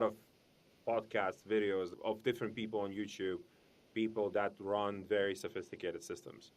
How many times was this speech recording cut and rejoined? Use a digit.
1